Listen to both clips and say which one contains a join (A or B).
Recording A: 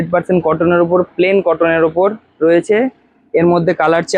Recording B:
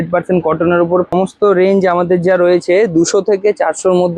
B